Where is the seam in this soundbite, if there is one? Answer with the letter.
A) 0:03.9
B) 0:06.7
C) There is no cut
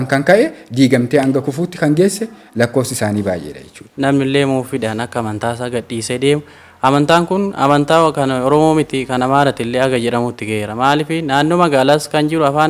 A